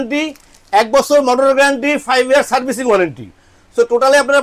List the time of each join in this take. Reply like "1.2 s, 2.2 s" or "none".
none